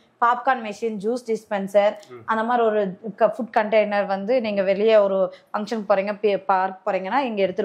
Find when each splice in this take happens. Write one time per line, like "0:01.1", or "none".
none